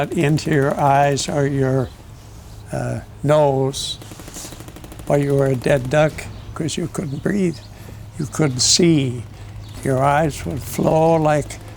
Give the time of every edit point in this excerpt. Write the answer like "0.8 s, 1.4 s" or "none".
6.5 s